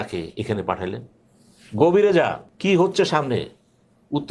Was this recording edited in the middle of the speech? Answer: yes; 1 cut; at 2.5 s

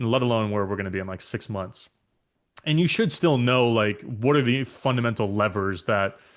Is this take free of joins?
yes; 0 cuts

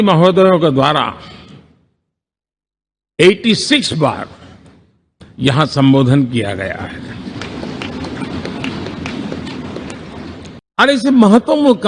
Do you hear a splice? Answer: no; 0 cuts

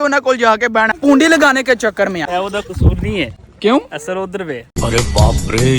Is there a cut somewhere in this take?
yes; 2 cuts; at 0.9 s, 2.2 s

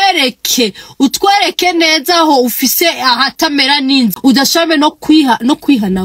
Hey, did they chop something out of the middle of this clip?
yes; 1 cut; at 4.2 s

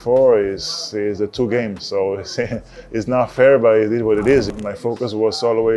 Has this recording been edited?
yes; 1 cut; at 4.5 s

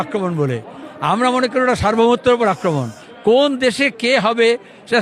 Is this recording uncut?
yes; 0 cuts

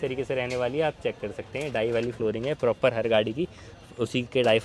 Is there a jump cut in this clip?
no; 0 cuts

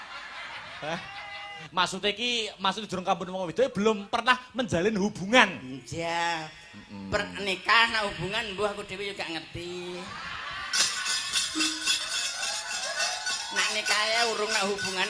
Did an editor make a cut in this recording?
yes; 1 cut; at 1.6 s

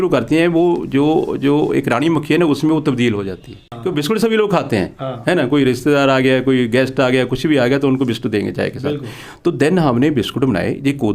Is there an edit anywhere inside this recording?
yes; 1 cut; at 3.7 s

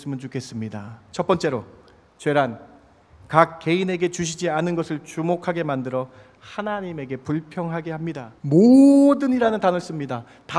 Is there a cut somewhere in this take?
yes; 2 cuts; at 1.0 s, 8.3 s

